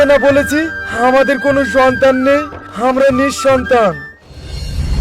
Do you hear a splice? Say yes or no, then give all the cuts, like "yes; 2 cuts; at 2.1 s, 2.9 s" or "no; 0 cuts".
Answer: yes; 1 cut; at 4.1 s